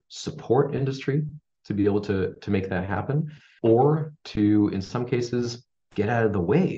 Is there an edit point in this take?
yes; 1 cut; at 3.4 s

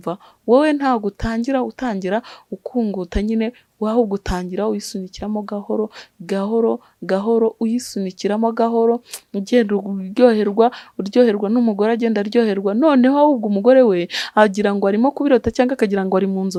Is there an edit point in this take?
no; 0 cuts

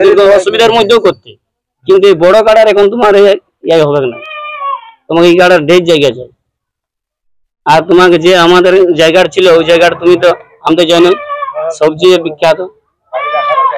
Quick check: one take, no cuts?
yes; 0 cuts

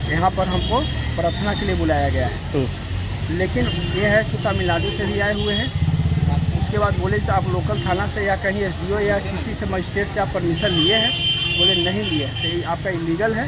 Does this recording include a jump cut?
no; 0 cuts

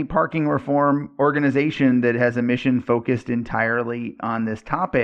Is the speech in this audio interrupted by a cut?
no; 0 cuts

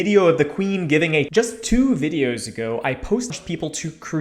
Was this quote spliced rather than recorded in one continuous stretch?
yes; 2 cuts; at 1.3 s, 3.3 s

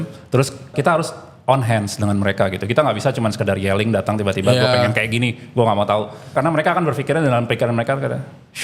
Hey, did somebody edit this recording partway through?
yes; 2 cuts; at 0.7 s, 6.3 s

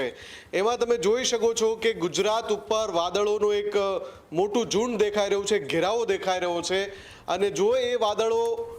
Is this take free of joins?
yes; 0 cuts

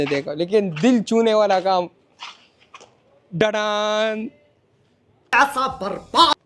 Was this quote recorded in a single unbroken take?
yes; 0 cuts

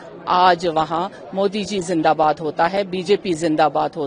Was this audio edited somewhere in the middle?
no; 0 cuts

